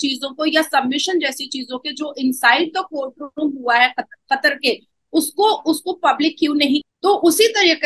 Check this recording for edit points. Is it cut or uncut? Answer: cut